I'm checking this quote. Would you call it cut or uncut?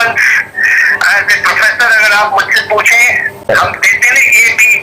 cut